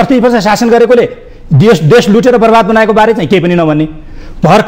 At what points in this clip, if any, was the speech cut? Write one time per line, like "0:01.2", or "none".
none